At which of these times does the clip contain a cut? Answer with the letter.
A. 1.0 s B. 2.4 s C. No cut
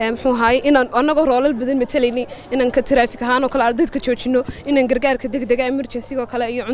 C